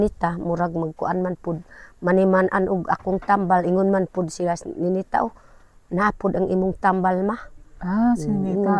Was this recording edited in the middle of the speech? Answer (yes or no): no